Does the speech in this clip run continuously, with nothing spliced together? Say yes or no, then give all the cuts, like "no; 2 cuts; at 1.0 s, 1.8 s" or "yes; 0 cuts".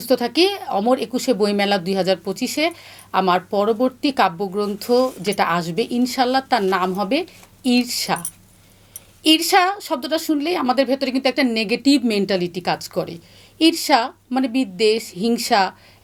yes; 0 cuts